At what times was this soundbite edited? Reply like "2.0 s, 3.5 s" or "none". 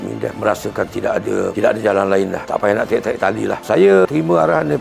none